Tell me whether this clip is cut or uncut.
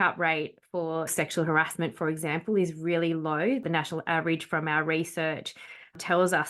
cut